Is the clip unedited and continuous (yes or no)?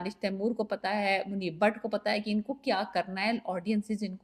yes